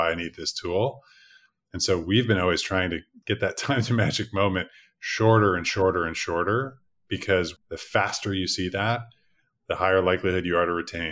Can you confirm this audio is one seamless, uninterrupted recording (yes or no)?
no